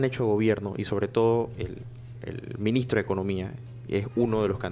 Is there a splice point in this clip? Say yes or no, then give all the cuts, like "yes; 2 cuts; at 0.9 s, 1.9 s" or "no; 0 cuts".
no; 0 cuts